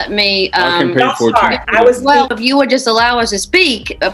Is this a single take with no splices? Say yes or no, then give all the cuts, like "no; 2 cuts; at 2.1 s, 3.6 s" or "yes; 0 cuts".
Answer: no; 1 cut; at 2.3 s